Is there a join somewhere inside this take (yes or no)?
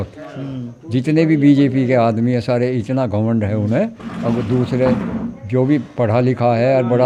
no